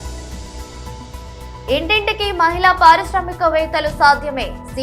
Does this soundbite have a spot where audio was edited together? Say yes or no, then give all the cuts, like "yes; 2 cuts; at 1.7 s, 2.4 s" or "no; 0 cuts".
yes; 1 cut; at 1.3 s